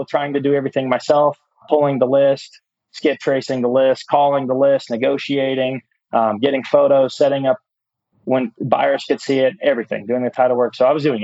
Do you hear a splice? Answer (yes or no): no